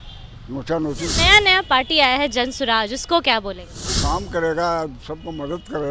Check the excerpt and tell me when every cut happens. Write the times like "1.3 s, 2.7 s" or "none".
1.1 s, 4.0 s